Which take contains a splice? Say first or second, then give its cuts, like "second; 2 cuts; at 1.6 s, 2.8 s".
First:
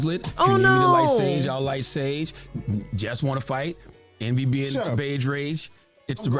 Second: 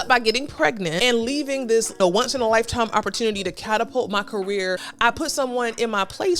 second; 3 cuts; at 1.0 s, 2.0 s, 4.9 s